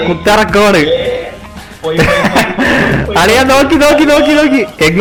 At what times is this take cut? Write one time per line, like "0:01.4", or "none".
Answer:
none